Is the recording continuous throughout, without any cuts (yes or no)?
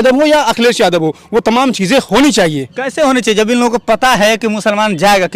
yes